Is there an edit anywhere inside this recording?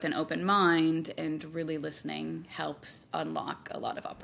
no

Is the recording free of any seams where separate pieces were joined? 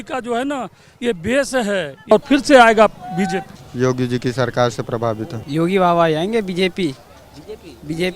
no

